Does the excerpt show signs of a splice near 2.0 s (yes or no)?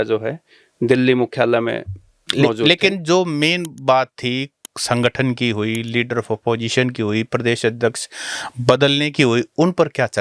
no